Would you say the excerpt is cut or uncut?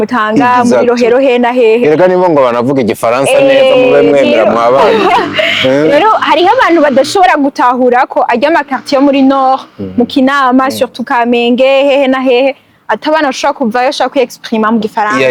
uncut